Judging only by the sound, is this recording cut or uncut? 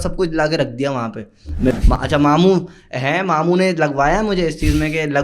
cut